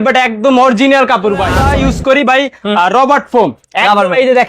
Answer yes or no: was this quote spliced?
yes